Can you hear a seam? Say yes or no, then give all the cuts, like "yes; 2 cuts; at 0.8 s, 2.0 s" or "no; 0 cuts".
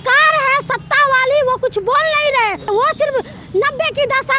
yes; 1 cut; at 2.7 s